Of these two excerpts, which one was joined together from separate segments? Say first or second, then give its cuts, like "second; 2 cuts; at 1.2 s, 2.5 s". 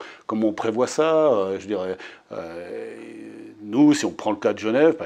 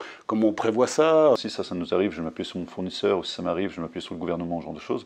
second; 1 cut; at 1.4 s